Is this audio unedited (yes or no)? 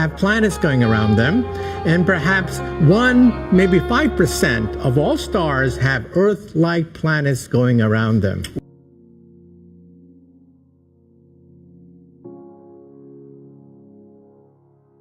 no